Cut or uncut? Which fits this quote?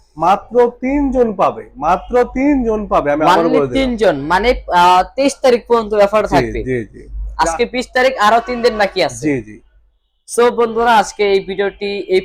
uncut